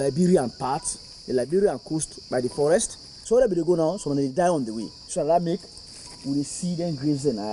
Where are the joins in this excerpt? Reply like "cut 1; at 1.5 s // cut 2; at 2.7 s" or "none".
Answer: cut 1; at 3.1 s // cut 2; at 5.0 s